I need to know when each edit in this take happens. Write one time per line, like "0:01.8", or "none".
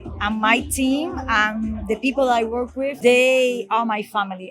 0:02.9